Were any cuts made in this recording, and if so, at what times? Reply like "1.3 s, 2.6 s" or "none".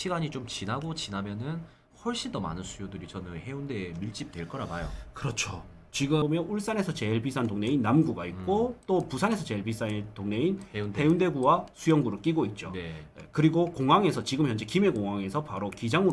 6.2 s